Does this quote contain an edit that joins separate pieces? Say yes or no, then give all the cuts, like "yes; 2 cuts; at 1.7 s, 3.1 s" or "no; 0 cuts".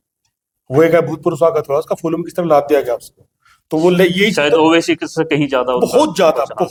no; 0 cuts